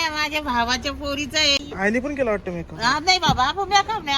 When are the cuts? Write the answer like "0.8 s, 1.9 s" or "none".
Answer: 1.6 s